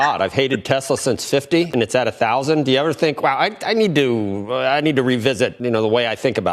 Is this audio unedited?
no; 2 cuts; at 1.7 s, 5.6 s

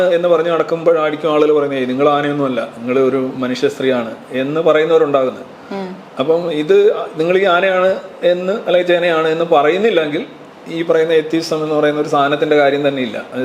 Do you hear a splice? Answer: no; 0 cuts

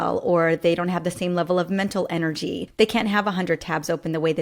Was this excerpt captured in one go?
no; 1 cut; at 2.6 s

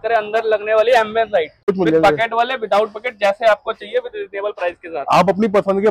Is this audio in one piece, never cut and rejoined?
no; 1 cut; at 1.6 s

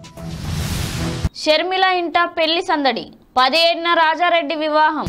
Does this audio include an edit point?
yes; 1 cut; at 1.3 s

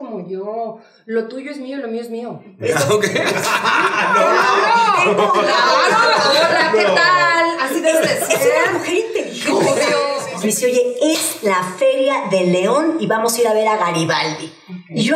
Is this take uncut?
no; 1 cut; at 10.2 s

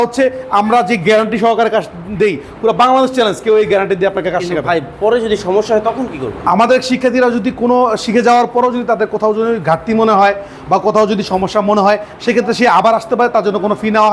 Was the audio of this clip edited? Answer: no; 0 cuts

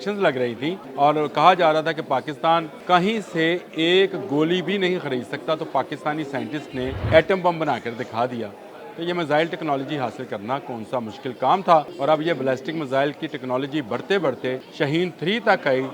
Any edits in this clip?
yes; 5 cuts; at 0.8 s, 2.7 s, 7.0 s, 11.9 s, 14.7 s

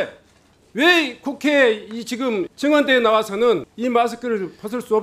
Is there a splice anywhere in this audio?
yes; 2 cuts; at 2.5 s, 3.7 s

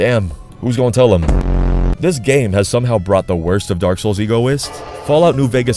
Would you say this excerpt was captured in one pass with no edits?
no; 1 cut; at 1.7 s

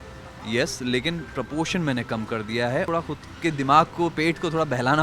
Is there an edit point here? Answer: yes; 1 cut; at 2.9 s

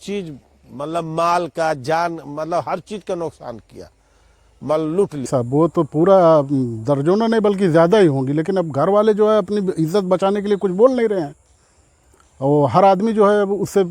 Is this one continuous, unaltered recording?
no; 1 cut; at 5.3 s

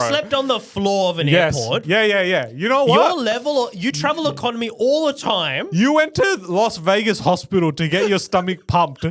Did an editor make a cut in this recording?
no; 0 cuts

